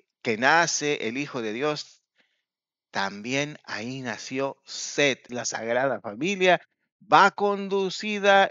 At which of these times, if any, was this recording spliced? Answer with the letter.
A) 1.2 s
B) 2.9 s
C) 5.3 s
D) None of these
C